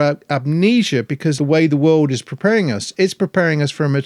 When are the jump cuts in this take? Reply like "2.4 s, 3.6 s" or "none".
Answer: 1.4 s